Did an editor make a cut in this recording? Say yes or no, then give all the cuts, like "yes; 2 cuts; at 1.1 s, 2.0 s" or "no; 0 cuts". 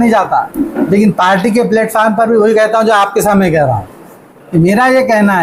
no; 0 cuts